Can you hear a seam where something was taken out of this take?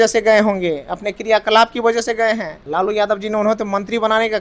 yes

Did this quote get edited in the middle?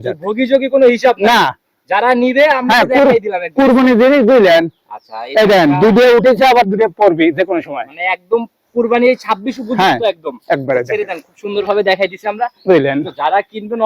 no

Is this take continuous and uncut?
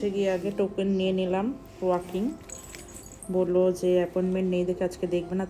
yes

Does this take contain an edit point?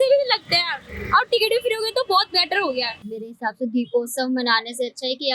yes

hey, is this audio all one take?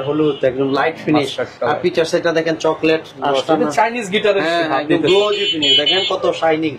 yes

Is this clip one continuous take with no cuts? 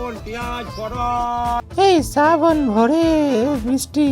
no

